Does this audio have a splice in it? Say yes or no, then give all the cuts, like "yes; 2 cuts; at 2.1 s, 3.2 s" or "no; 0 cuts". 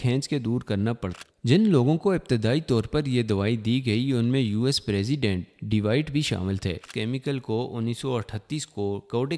yes; 2 cuts; at 1.1 s, 6.9 s